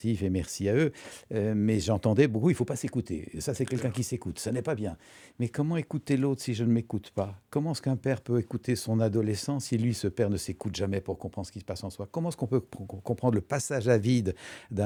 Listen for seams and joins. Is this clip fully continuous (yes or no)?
yes